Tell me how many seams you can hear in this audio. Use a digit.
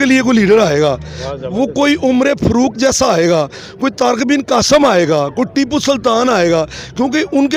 0